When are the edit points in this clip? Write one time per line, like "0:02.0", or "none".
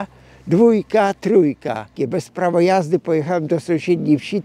0:01.9